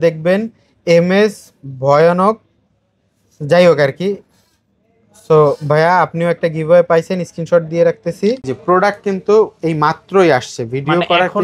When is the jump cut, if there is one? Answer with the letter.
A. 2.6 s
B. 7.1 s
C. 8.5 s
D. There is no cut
C